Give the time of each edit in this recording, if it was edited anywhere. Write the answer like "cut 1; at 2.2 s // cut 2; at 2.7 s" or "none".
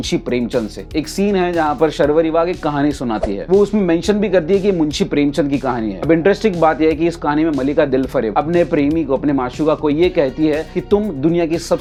none